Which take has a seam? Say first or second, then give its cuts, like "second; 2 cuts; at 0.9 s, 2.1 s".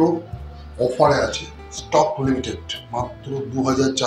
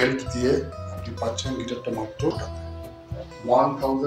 second; 1 cut; at 2.4 s